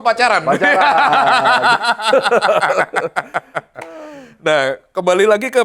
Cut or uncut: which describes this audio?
uncut